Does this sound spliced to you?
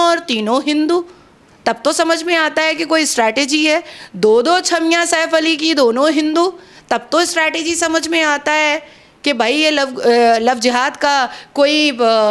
no; 0 cuts

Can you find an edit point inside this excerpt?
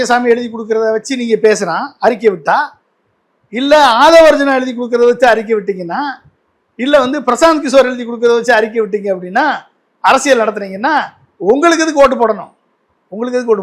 no; 0 cuts

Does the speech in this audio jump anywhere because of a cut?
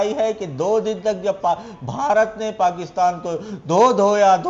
no; 0 cuts

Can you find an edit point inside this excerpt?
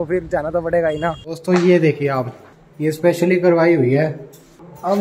yes; 1 cut; at 1.3 s

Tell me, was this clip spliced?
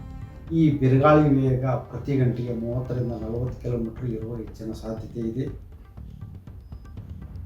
no; 0 cuts

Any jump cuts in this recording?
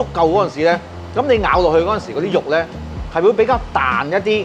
yes; 1 cut; at 1.0 s

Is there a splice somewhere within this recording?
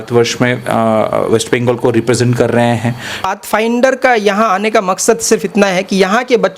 yes; 1 cut; at 3.2 s

